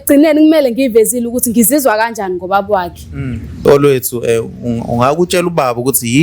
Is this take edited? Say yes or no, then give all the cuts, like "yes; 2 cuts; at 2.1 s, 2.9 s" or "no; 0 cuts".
yes; 1 cut; at 3.6 s